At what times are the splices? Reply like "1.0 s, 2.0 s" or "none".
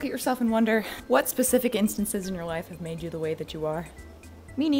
1.0 s